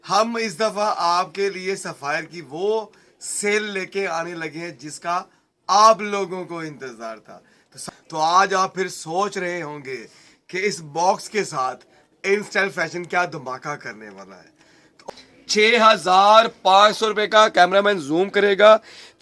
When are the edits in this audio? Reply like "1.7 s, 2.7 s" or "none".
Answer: 7.8 s, 15.0 s